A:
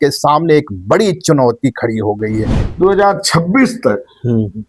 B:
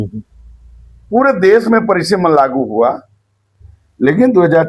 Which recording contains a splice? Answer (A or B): A